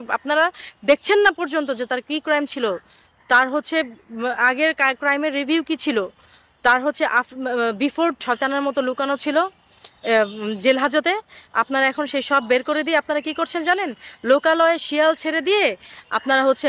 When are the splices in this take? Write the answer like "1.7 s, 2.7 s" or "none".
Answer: 8.2 s